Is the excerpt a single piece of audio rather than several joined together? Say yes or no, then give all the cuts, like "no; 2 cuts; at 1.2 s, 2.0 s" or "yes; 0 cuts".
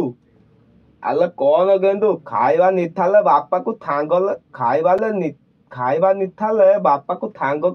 yes; 0 cuts